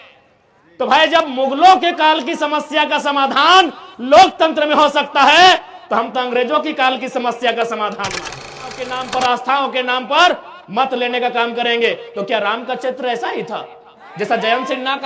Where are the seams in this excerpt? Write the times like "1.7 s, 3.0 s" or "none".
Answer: 8.8 s